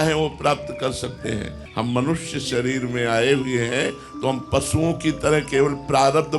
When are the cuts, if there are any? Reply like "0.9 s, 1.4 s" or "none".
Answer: 1.6 s